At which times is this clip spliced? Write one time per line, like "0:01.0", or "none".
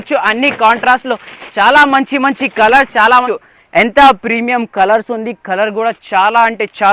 0:03.2